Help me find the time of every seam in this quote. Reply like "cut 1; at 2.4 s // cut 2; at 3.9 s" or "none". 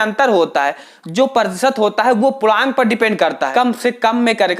cut 1; at 3.5 s